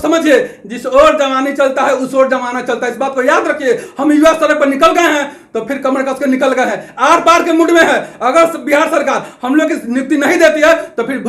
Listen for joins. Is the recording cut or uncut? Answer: uncut